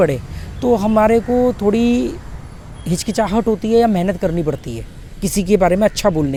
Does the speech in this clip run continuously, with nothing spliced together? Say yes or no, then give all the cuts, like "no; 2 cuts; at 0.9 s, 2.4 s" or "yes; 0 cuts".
yes; 0 cuts